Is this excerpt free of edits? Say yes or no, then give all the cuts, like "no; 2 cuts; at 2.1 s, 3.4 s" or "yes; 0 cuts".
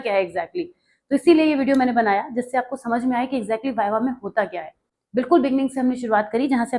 yes; 0 cuts